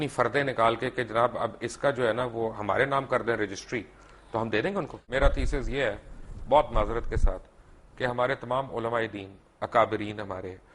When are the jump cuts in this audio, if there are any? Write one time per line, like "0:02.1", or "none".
0:05.0